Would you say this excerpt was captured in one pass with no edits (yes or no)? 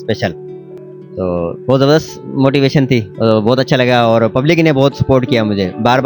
no